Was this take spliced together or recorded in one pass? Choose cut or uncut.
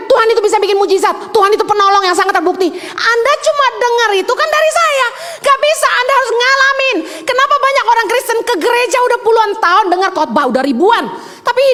uncut